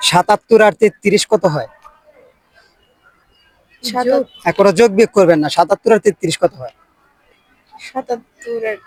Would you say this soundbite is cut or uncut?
uncut